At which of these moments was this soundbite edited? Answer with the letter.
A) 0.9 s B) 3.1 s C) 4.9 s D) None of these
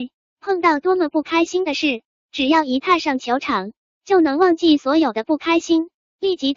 D